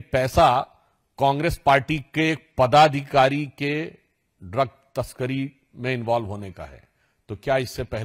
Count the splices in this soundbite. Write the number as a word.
zero